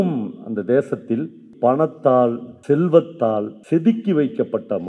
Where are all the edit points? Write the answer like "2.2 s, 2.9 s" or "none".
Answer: 1.5 s, 2.5 s, 3.5 s